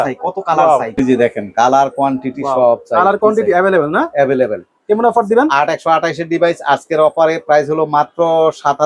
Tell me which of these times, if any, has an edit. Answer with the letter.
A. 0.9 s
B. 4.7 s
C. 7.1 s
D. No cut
A